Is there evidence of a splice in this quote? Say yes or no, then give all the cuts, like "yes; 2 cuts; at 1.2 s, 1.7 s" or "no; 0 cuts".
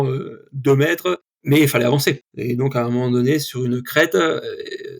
yes; 2 cuts; at 1.3 s, 2.3 s